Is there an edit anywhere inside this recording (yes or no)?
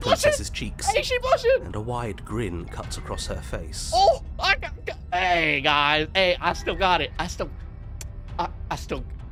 no